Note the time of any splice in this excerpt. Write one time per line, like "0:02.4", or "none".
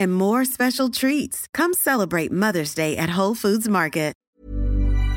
0:04.2